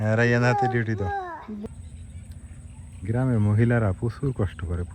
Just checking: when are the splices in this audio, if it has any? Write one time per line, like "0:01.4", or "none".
0:01.6